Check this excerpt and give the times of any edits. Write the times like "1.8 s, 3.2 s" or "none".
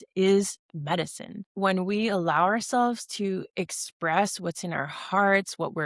1.5 s